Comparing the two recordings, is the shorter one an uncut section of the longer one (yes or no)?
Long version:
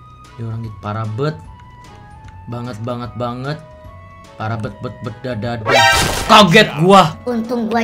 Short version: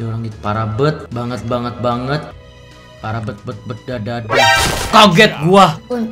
no